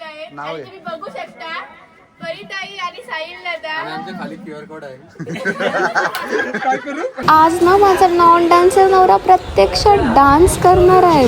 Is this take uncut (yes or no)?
no